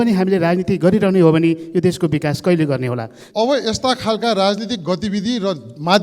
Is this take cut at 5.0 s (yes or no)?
no